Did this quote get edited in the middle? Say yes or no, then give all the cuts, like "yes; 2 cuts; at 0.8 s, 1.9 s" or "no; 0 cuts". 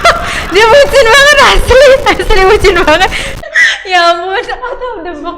yes; 1 cut; at 3.3 s